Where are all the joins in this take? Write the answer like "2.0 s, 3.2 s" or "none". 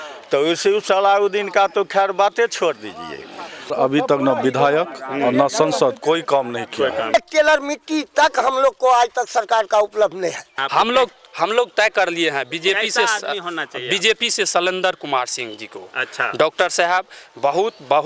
3.7 s, 7.1 s, 10.5 s